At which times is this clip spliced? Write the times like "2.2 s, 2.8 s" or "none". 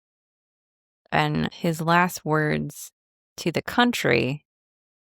1.5 s